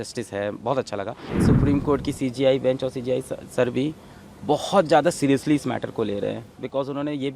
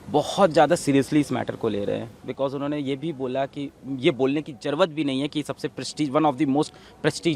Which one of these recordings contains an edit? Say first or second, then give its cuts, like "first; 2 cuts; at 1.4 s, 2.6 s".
first; 1 cut; at 1.3 s